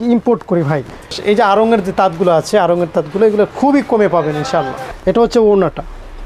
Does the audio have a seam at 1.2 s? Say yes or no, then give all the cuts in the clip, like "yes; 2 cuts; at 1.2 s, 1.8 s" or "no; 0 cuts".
yes; 2 cuts; at 1.2 s, 4.8 s